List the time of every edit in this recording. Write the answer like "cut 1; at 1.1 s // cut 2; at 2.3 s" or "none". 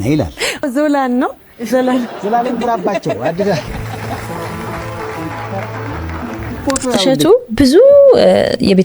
cut 1; at 7.0 s

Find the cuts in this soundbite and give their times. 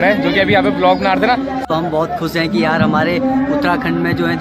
cut 1; at 1.6 s

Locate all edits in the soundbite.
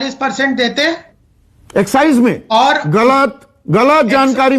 none

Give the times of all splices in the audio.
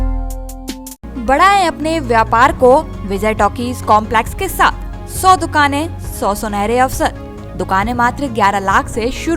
none

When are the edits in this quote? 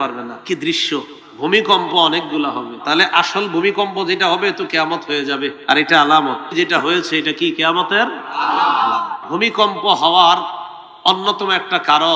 cut 1; at 1.2 s // cut 2; at 2.7 s // cut 3; at 5.6 s // cut 4; at 6.4 s // cut 5; at 9.2 s

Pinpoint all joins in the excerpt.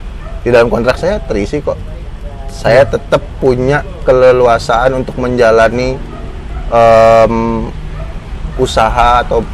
none

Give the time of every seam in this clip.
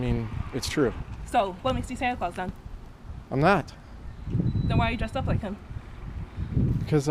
none

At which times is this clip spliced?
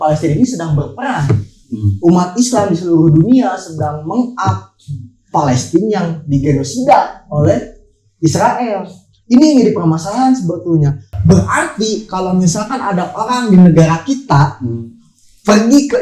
cut 1; at 11.1 s

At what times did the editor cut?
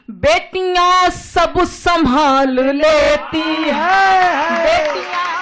none

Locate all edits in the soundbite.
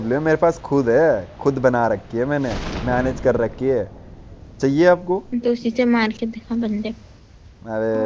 cut 1; at 4.9 s

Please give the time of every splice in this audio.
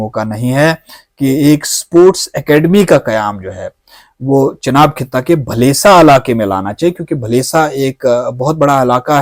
none

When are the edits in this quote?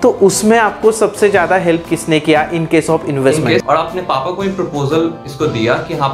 cut 1; at 3.6 s

